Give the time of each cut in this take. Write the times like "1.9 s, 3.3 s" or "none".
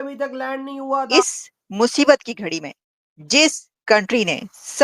1.1 s